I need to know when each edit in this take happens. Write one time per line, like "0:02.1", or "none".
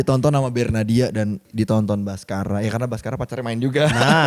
0:01.5